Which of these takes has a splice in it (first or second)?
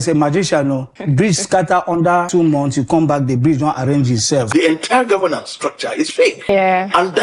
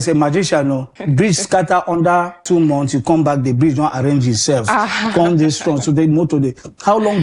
first